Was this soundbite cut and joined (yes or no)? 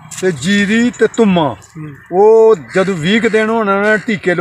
no